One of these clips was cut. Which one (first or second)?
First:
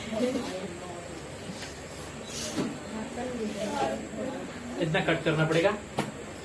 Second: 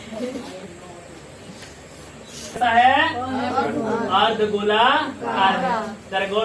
second